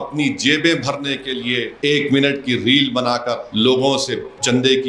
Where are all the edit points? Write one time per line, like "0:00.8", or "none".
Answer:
0:01.7
0:03.4